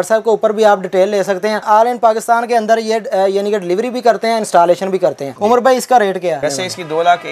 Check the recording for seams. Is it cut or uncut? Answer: uncut